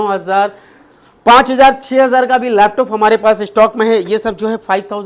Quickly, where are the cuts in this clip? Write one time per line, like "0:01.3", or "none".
none